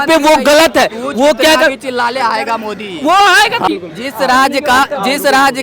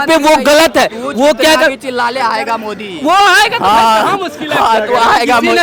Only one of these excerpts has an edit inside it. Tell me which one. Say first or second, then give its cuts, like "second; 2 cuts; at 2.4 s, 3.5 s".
first; 1 cut; at 3.7 s